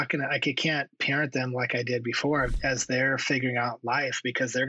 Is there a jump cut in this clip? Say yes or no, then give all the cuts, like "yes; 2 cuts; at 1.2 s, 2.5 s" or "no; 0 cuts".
yes; 1 cut; at 2.5 s